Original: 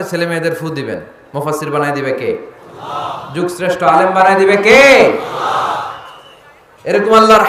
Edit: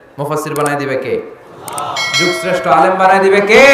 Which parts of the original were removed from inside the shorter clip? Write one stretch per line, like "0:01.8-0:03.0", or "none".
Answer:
none